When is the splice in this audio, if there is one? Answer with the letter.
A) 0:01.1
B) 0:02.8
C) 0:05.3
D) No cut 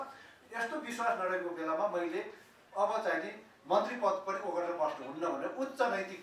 D